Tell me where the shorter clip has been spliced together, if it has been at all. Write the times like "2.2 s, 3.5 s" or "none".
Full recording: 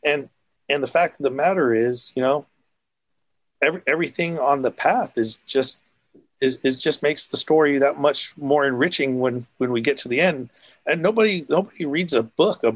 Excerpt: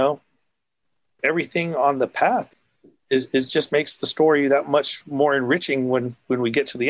1.2 s, 2.5 s